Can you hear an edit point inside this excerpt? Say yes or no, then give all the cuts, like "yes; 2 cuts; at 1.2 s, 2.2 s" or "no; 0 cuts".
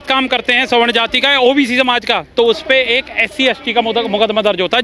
no; 0 cuts